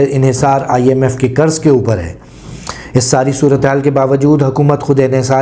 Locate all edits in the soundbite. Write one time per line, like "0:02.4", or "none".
none